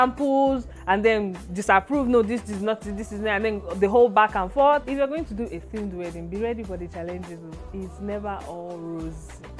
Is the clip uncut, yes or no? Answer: no